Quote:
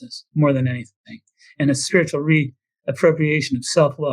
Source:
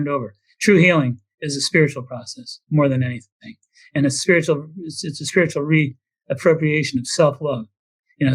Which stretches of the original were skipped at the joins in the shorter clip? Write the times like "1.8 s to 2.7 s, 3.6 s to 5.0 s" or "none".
4.2 s to 5.2 s